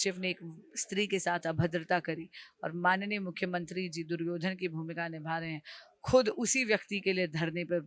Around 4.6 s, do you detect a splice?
no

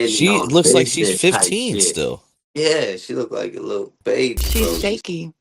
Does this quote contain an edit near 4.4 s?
yes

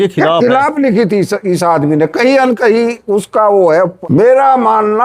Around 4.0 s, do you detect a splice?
yes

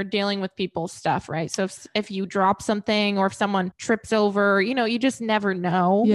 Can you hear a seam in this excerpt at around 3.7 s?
yes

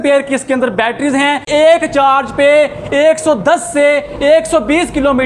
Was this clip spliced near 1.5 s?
yes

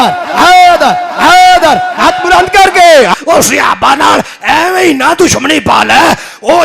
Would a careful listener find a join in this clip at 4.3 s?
no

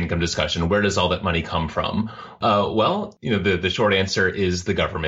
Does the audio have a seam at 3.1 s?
yes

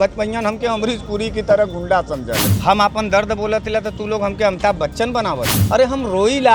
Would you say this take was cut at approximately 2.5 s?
yes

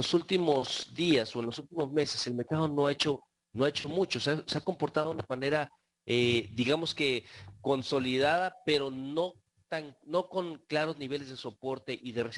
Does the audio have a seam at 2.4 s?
no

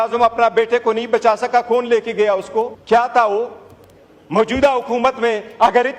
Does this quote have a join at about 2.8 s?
yes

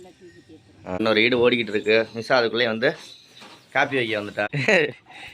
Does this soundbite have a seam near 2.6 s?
no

